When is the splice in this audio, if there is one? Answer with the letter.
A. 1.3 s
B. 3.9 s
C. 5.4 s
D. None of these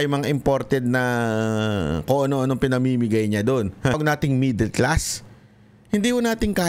B